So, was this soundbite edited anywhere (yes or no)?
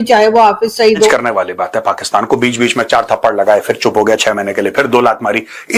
yes